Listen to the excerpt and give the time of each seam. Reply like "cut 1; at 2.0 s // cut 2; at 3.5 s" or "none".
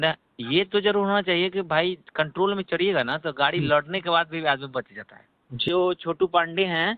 cut 1; at 5.6 s